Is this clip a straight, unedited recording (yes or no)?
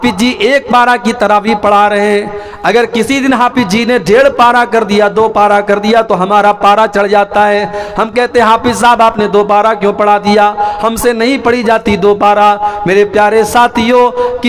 yes